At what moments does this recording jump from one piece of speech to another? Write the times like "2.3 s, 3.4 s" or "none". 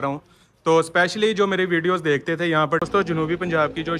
2.8 s